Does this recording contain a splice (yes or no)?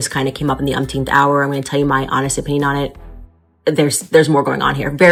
no